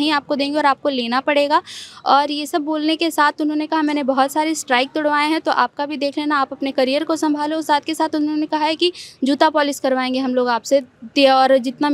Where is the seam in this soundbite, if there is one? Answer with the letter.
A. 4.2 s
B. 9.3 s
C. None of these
C